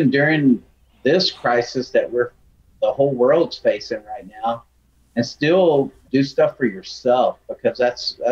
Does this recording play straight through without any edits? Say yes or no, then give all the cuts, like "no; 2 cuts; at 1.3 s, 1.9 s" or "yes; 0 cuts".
no; 1 cut; at 6.0 s